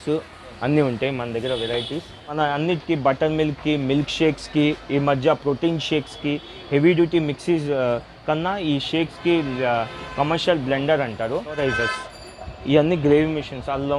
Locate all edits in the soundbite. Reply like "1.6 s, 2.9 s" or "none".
2.4 s, 11.6 s

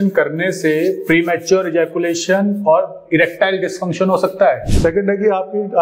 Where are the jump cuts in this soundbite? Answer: 4.7 s

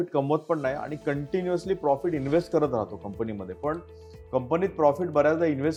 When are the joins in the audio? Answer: none

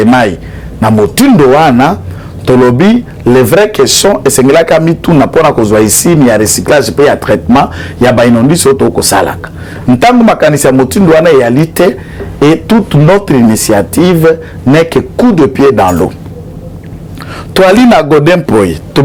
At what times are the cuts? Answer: none

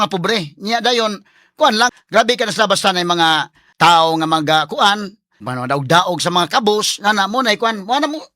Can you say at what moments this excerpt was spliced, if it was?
1.9 s, 3.6 s, 5.4 s

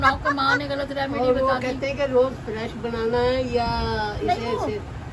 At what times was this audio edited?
none

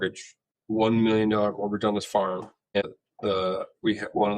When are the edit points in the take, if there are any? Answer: 2.8 s

